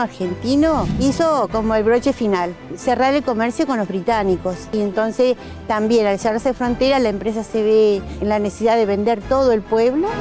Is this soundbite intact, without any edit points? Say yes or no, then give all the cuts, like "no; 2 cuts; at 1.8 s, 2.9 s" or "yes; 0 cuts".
no; 4 cuts; at 0.9 s, 2.7 s, 4.7 s, 8.2 s